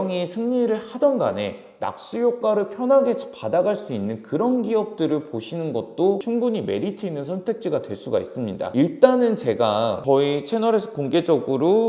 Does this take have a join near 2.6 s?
no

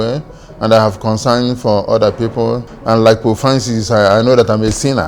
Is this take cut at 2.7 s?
yes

